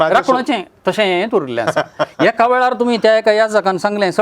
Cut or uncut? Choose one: uncut